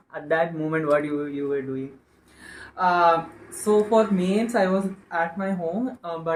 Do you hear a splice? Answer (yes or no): no